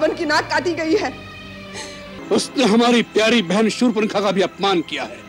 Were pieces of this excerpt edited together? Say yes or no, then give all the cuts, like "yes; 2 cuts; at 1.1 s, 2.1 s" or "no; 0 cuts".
yes; 1 cut; at 2.1 s